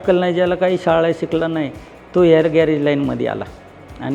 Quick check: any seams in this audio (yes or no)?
no